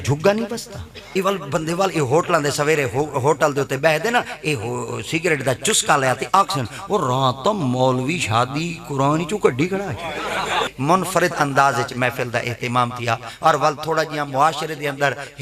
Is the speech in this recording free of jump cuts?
no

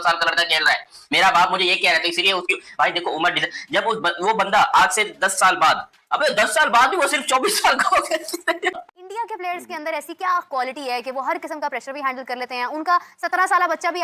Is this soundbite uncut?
yes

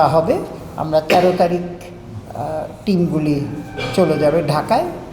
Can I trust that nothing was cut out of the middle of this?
yes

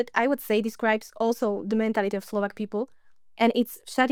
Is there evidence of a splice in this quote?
no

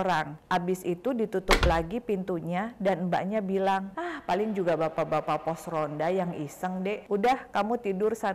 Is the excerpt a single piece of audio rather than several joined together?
yes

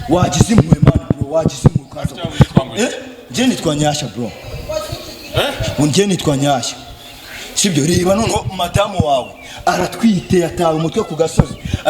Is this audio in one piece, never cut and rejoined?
yes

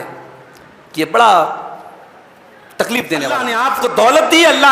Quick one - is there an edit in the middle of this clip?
yes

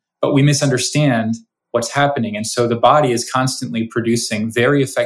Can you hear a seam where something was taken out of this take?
no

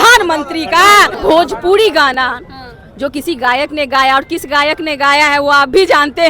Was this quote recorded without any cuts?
no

